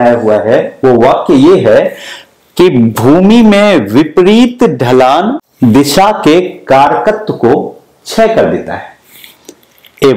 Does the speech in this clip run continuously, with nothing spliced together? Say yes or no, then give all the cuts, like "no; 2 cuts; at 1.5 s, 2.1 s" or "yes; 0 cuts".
no; 1 cut; at 5.4 s